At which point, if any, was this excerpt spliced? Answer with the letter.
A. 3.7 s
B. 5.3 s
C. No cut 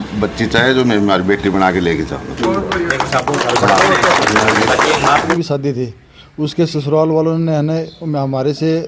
B